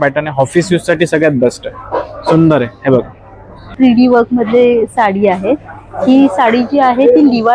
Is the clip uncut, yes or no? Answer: no